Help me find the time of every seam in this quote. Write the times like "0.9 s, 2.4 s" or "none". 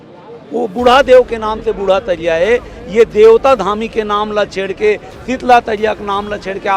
none